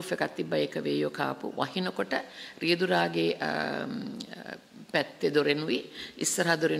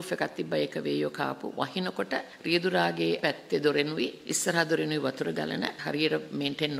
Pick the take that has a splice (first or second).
second